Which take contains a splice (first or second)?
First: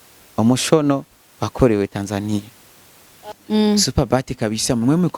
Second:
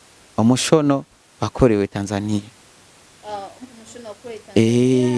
first